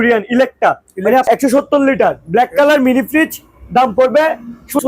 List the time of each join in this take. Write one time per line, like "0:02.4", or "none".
0:01.2